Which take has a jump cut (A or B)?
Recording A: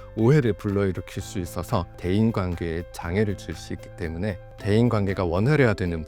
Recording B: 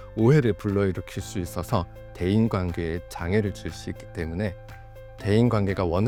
A